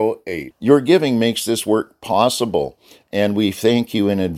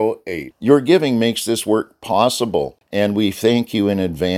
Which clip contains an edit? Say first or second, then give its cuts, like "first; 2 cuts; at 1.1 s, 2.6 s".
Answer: second; 1 cut; at 2.8 s